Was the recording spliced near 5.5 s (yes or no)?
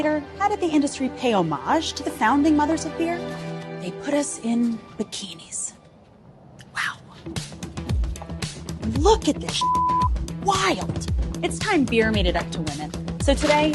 no